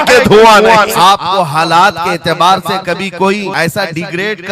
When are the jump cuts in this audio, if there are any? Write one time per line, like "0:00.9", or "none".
0:00.9
0:03.5